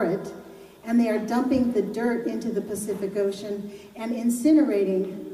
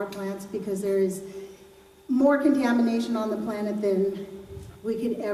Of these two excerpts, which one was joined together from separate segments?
first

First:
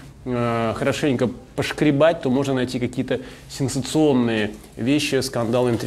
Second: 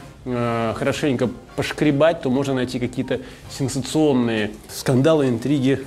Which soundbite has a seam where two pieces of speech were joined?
second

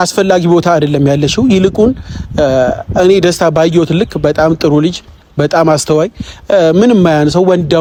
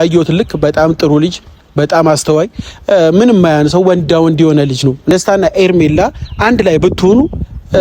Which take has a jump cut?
second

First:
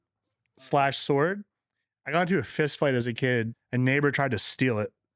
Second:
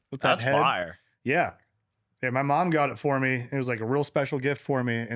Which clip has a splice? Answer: first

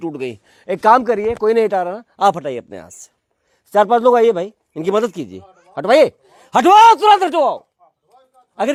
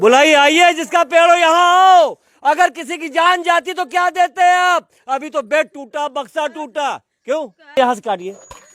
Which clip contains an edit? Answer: second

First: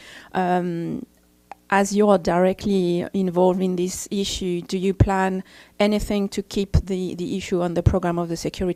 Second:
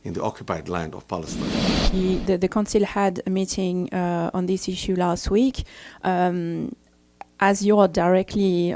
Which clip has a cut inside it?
second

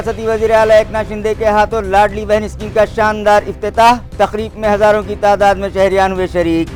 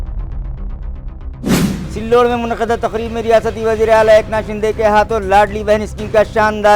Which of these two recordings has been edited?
second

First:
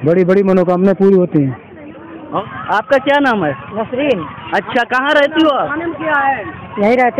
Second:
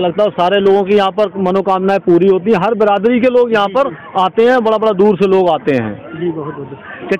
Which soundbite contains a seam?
first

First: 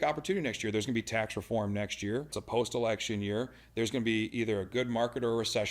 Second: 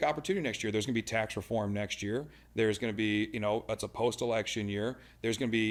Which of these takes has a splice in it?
first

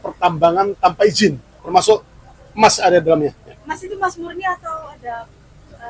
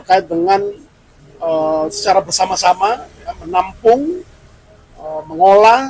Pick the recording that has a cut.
first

